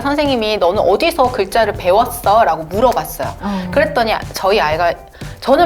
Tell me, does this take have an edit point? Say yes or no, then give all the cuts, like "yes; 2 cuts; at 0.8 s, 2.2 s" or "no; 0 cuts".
no; 0 cuts